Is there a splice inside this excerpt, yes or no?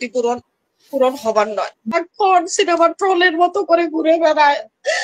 yes